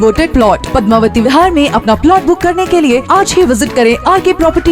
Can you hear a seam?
no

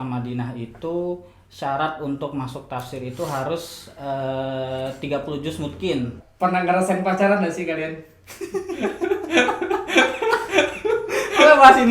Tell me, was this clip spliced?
yes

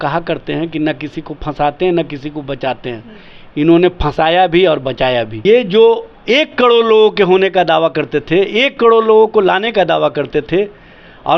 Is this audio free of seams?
no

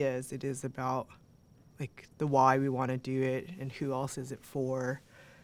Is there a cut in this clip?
no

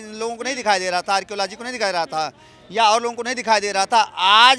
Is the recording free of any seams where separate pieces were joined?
yes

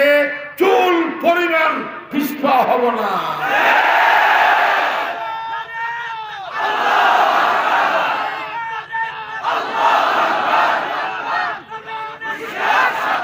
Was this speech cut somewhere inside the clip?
no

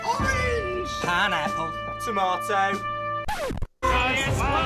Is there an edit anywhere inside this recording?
no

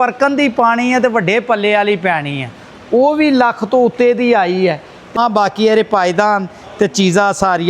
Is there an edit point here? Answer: yes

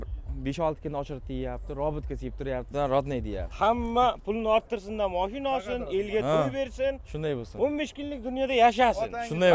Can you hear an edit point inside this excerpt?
yes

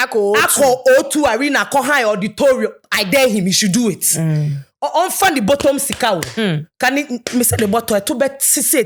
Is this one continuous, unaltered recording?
yes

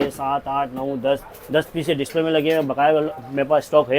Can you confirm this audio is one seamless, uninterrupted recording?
yes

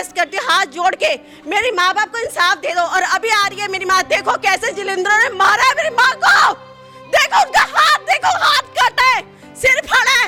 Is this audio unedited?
yes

